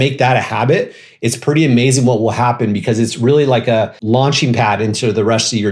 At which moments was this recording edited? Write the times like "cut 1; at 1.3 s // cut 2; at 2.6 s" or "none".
cut 1; at 4.0 s